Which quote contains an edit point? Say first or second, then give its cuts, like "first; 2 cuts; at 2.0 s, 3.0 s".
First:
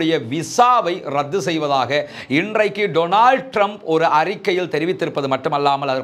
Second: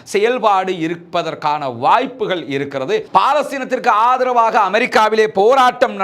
second; 1 cut; at 3.1 s